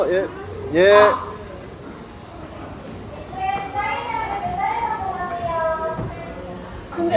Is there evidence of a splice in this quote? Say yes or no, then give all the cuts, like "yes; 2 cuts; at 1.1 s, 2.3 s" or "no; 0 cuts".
no; 0 cuts